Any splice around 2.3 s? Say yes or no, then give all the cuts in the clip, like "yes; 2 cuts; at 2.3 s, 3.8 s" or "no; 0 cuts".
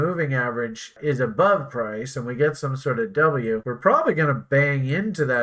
no; 2 cuts; at 1.0 s, 3.7 s